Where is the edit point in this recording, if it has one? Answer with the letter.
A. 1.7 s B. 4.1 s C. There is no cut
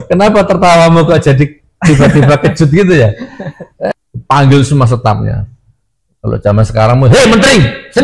B